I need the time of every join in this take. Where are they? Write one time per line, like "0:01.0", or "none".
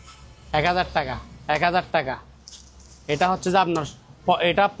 none